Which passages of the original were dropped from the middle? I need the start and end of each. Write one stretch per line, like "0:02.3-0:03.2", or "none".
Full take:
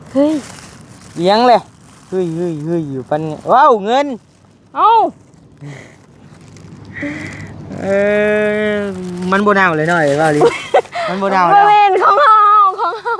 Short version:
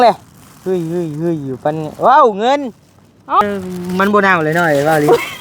0:04.9-0:08.7